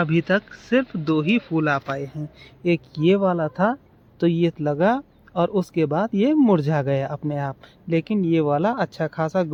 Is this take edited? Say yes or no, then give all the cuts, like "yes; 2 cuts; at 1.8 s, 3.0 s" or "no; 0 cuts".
no; 0 cuts